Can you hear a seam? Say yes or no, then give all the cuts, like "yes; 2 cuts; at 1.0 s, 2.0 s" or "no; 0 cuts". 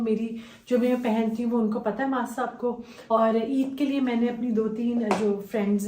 yes; 1 cut; at 2.9 s